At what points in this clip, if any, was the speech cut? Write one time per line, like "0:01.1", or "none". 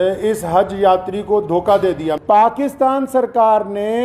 0:02.2